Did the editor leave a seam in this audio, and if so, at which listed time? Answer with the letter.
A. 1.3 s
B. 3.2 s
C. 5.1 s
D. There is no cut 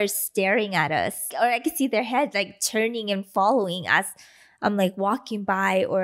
A